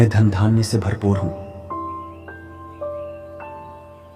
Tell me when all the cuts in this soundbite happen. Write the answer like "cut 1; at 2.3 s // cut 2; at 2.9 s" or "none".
cut 1; at 1.3 s